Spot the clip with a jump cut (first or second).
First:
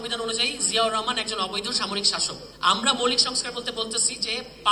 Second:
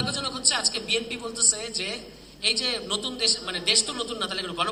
first